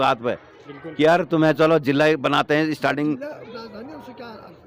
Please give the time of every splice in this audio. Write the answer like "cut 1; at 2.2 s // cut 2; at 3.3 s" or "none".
none